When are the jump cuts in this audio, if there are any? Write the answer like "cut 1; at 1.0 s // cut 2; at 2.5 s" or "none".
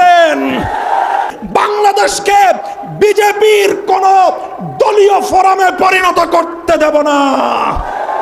cut 1; at 1.3 s